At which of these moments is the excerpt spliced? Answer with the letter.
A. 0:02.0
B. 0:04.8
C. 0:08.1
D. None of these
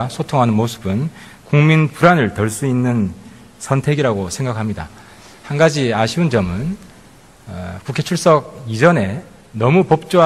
C